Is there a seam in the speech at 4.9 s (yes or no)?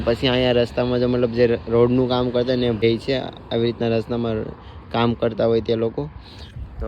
no